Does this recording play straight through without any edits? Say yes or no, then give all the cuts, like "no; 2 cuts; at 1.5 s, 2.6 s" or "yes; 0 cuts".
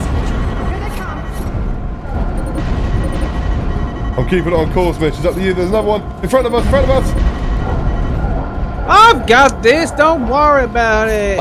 yes; 0 cuts